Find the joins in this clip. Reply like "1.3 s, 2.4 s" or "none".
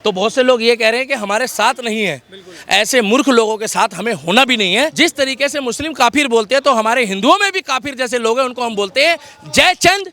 4.9 s